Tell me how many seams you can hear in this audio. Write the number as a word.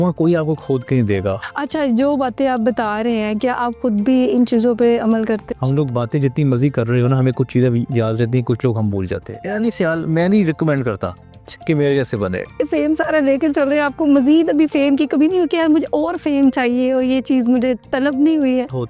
four